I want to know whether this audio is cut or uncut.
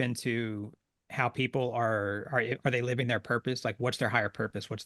uncut